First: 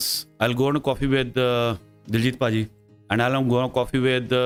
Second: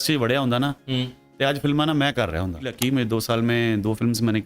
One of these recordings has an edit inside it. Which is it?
second; 1 cut; at 2.7 s

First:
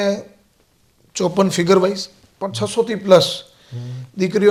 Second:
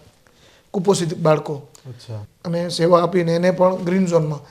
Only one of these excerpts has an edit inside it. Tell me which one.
second; 1 cut; at 2.2 s

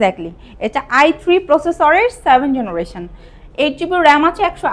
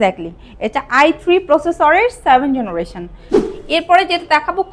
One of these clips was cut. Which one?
second; 1 cut; at 3.4 s

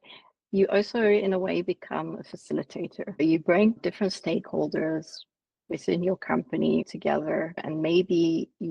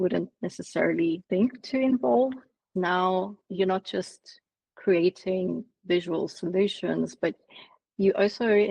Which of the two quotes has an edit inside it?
second; 2 cuts; at 2.7 s, 3.4 s

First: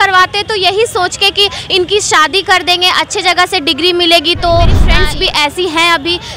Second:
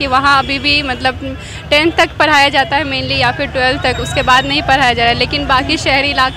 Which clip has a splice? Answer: first; 1 cut; at 4.7 s

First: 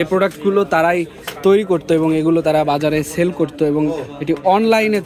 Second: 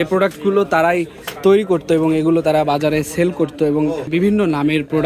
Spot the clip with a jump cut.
second; 1 cut; at 4.1 s

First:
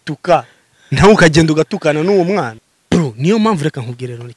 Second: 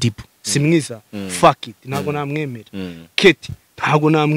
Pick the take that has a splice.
first; 1 cut; at 2.5 s

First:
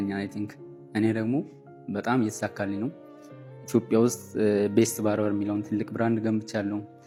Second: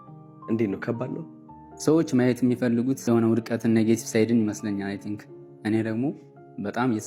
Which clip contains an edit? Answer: second; 1 cut; at 3.0 s

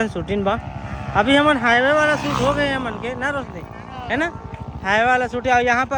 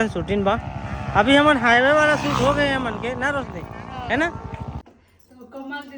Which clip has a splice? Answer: second; 1 cut; at 4.7 s

